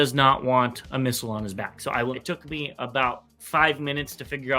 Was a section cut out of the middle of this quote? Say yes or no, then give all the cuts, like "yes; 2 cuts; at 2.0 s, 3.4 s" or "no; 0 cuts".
yes; 1 cut; at 2.1 s